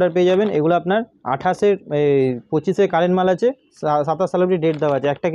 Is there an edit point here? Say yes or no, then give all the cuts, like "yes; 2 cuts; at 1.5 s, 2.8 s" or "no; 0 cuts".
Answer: no; 0 cuts